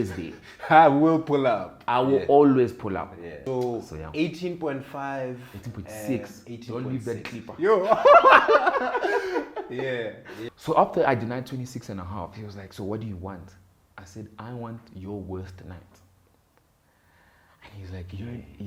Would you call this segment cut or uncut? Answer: cut